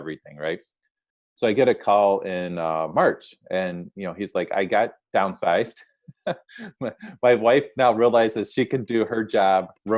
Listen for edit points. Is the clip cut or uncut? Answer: uncut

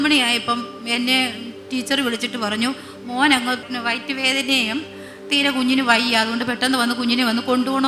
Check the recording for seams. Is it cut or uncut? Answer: cut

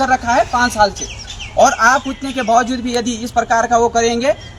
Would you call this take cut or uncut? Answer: uncut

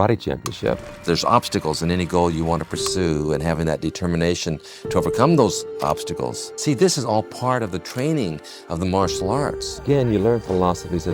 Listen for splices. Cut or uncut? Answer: cut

